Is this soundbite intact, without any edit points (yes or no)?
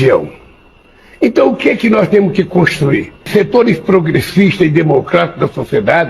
no